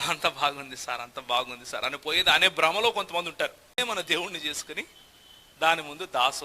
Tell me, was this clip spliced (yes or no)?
yes